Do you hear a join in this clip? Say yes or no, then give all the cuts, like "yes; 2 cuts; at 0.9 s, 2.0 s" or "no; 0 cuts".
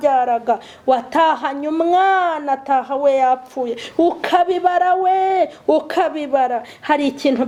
no; 0 cuts